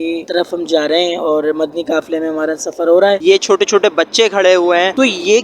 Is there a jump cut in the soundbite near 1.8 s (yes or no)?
no